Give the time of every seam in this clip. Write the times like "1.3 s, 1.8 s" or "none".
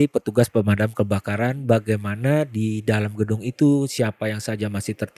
none